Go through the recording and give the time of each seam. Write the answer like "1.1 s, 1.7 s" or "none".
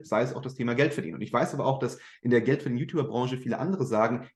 none

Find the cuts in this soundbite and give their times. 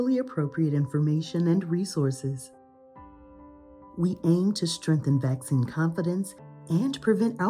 2.5 s, 3.9 s

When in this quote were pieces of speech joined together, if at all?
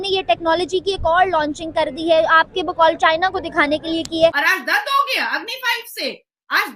4.4 s

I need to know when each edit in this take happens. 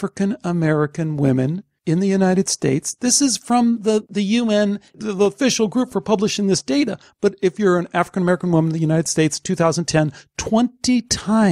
1.7 s, 4.1 s

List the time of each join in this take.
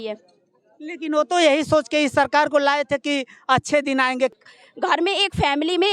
4.3 s

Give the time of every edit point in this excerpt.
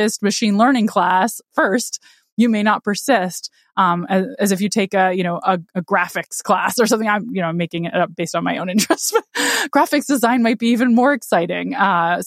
none

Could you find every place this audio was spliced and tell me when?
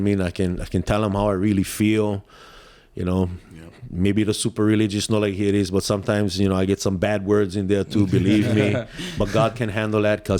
none

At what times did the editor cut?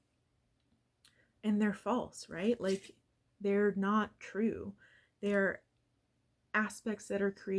none

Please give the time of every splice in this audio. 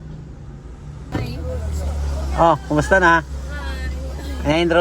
1.1 s

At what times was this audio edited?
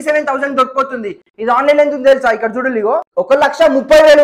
3.1 s

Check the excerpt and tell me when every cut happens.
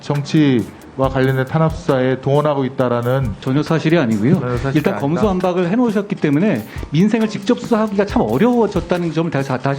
3.4 s

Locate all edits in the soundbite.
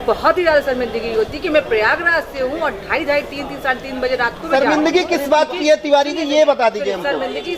4.4 s

